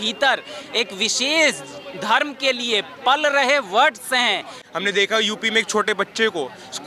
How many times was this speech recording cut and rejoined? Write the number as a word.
one